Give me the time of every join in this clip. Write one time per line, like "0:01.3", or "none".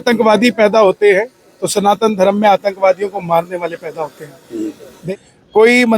0:04.9